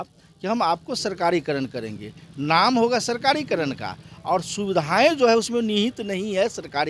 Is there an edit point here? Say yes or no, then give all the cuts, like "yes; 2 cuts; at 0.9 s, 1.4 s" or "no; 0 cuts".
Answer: no; 0 cuts